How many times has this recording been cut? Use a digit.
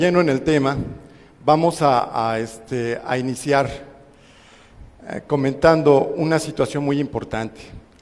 1